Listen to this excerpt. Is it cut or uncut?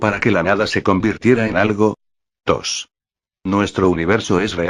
cut